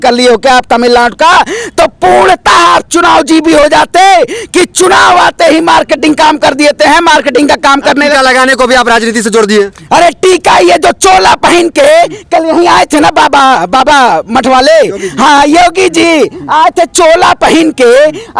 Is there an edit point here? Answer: no; 0 cuts

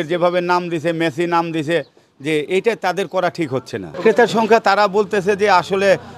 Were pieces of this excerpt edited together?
no; 0 cuts

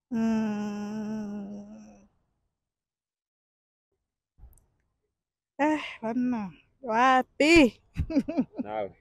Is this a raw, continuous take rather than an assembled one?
yes; 0 cuts

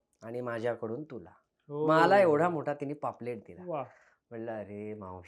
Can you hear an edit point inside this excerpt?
no; 0 cuts

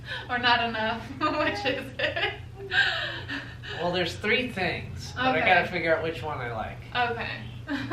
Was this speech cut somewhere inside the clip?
no; 0 cuts

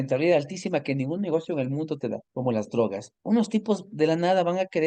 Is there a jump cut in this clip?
yes; 2 cuts; at 2.3 s, 3.1 s

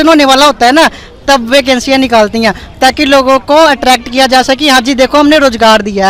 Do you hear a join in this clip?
no; 0 cuts

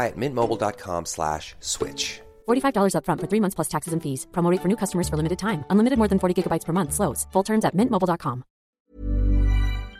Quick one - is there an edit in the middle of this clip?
yes; 1 cut; at 8.7 s

